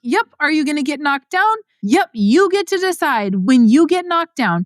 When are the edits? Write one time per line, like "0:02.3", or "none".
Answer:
0:01.7
0:03.4